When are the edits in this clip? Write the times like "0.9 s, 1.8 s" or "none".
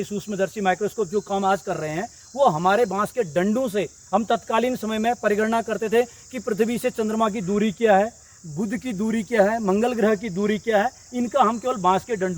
none